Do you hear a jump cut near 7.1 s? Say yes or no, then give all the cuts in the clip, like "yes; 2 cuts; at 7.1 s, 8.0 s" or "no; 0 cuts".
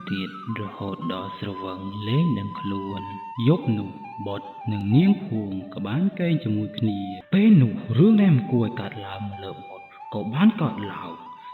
yes; 1 cut; at 7.1 s